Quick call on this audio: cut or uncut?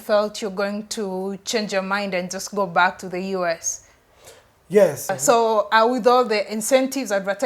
cut